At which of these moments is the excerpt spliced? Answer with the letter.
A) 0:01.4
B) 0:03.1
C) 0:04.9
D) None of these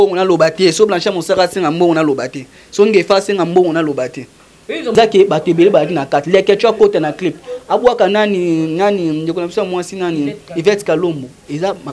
C